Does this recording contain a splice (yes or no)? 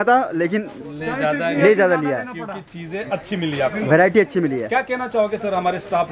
no